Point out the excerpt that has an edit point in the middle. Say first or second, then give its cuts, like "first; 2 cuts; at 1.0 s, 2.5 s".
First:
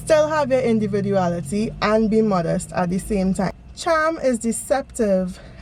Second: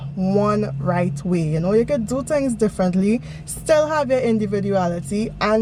first; 1 cut; at 3.6 s